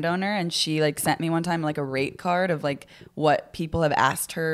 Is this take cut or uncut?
uncut